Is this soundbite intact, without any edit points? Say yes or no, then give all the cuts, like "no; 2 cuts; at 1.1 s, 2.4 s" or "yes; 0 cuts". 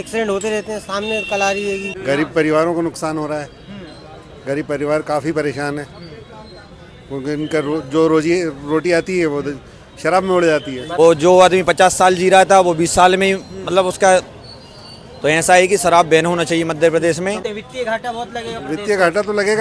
no; 3 cuts; at 1.9 s, 10.8 s, 17.4 s